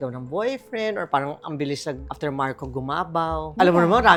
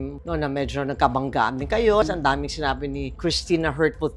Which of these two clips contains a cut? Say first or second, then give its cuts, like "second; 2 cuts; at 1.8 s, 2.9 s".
second; 1 cut; at 2.0 s